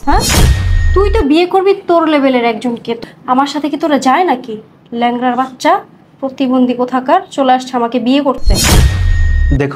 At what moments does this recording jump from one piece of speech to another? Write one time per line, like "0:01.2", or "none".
0:03.0